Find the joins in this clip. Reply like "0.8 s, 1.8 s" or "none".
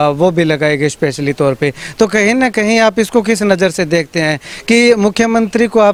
none